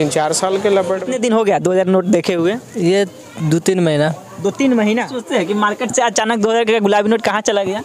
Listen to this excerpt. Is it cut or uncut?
cut